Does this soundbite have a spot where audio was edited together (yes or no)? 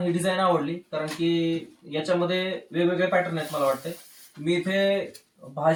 no